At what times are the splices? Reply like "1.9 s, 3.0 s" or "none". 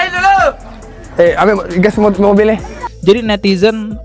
2.8 s